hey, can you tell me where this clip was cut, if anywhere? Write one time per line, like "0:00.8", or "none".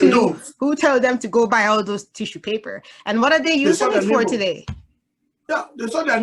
none

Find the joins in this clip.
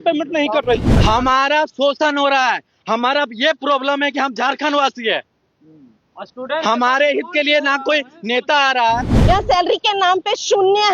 0:01.0
0:09.1

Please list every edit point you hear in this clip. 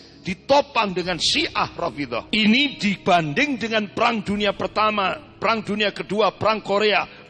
0:02.3

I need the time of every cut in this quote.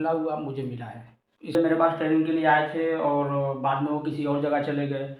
0:01.5

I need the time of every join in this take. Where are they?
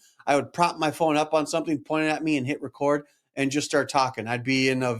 none

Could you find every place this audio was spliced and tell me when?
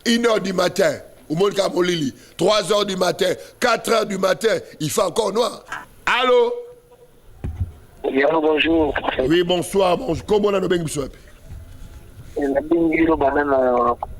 0:05.7

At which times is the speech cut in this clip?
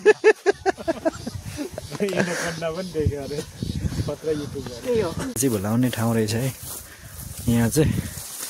0:05.4

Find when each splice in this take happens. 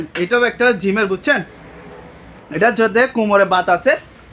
none

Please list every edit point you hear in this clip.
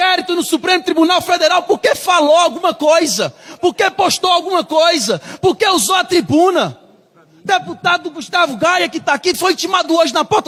none

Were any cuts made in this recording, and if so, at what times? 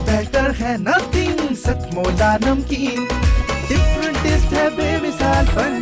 none

